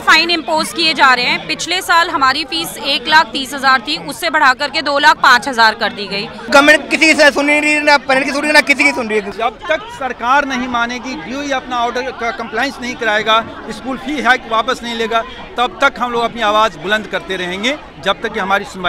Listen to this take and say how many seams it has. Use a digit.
2